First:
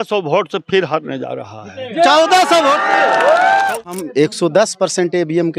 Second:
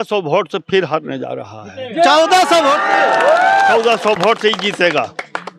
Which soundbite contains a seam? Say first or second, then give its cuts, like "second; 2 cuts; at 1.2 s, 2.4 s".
first; 1 cut; at 3.8 s